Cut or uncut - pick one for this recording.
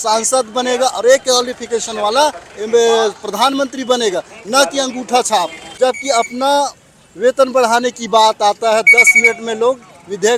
cut